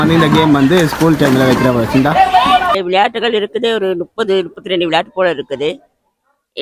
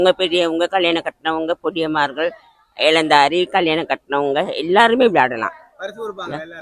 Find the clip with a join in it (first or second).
first